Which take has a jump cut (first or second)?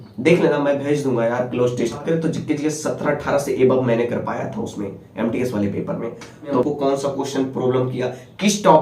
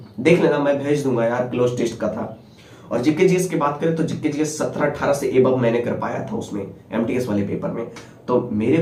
first